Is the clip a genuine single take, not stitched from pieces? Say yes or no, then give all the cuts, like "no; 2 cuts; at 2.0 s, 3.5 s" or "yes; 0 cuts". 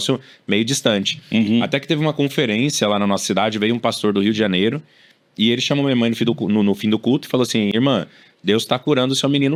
yes; 0 cuts